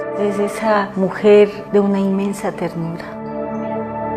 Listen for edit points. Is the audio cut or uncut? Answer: uncut